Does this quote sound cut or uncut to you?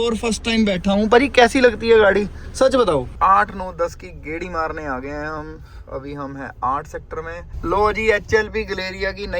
cut